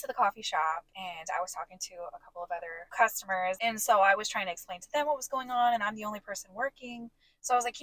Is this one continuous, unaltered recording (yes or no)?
no